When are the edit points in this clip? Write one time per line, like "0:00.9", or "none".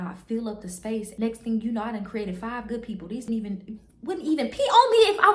0:01.1
0:03.3